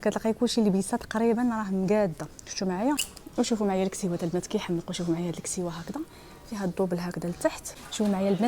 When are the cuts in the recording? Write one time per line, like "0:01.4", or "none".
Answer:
0:03.2
0:07.6

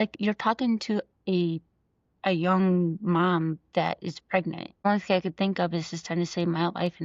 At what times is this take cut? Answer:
0:04.8

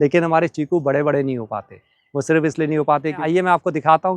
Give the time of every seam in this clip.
0:03.2

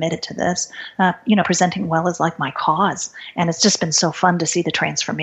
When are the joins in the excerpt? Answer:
none

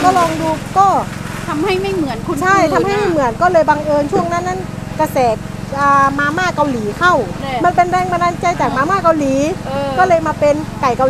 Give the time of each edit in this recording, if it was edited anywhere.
0:07.4

